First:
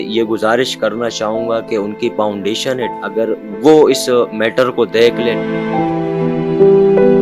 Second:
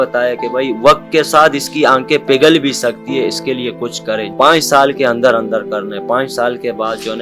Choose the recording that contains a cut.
second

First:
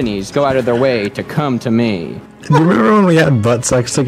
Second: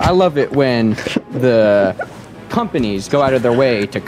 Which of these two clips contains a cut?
first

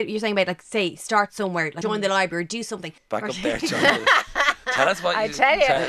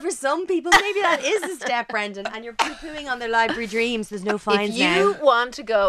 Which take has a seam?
first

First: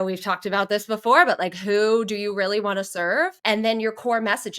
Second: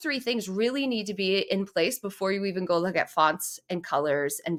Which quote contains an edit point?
first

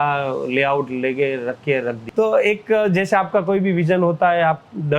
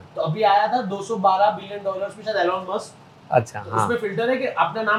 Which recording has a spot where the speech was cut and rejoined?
first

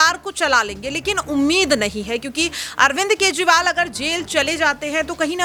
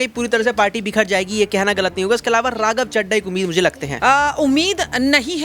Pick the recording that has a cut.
second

